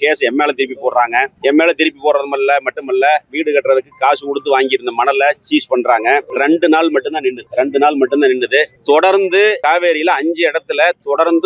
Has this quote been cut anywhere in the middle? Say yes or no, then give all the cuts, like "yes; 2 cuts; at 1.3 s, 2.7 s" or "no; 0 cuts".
no; 0 cuts